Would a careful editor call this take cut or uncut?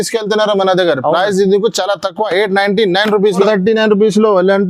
cut